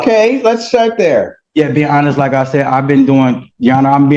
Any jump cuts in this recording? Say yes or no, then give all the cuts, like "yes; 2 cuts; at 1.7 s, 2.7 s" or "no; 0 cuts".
no; 0 cuts